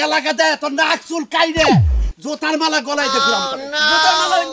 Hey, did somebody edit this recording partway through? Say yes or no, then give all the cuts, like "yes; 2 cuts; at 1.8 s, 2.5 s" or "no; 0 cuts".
no; 0 cuts